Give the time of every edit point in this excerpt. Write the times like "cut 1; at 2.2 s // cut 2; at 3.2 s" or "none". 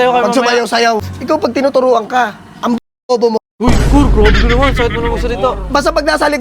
cut 1; at 1.1 s